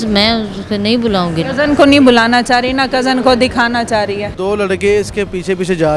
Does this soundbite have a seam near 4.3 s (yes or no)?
yes